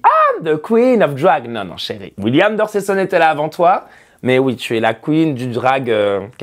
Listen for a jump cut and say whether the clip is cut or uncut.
uncut